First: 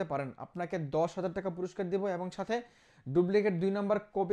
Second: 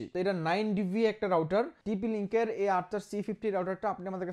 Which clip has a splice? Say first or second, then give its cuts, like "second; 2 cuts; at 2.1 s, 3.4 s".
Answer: second; 1 cut; at 1.8 s